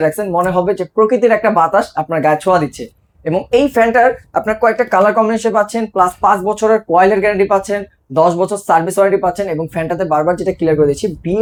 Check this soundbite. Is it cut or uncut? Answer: uncut